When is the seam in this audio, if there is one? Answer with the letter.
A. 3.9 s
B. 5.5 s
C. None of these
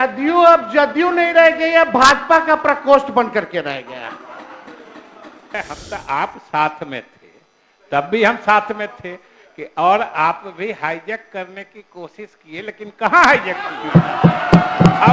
B